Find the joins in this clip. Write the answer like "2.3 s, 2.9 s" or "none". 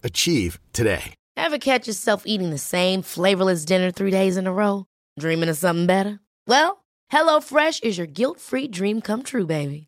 1.2 s